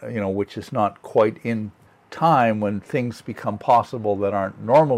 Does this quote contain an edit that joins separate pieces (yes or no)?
no